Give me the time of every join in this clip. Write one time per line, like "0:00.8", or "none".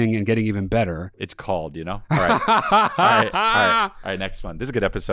0:01.3